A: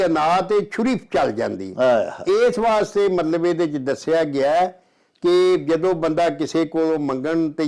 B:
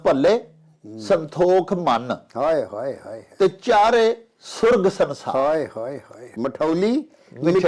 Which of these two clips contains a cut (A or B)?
B